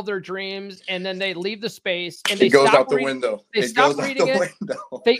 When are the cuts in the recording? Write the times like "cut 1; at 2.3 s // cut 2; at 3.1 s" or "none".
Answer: none